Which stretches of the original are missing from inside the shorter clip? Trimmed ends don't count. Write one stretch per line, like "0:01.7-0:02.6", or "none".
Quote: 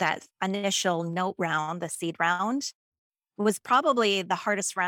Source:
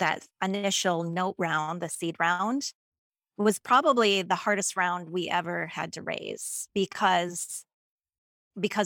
none